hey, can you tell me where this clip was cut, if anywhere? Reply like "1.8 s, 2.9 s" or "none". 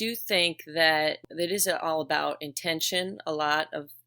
1.2 s